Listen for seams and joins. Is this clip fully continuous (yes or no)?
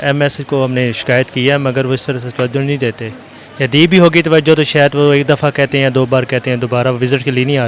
yes